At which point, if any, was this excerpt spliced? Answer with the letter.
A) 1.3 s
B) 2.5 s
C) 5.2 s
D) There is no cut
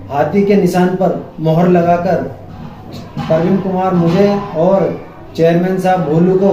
D